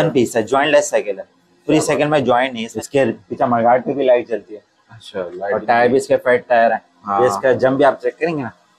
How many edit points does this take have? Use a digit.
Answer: 1